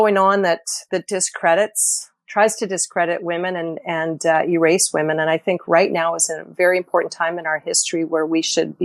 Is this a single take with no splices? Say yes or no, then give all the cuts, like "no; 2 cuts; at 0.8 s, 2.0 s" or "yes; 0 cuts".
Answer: yes; 0 cuts